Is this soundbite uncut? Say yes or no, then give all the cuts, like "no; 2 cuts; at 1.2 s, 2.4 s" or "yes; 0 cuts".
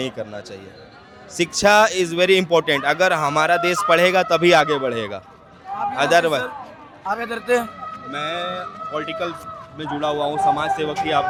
yes; 0 cuts